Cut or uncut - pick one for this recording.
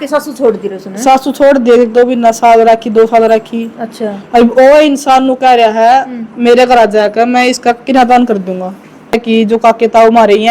cut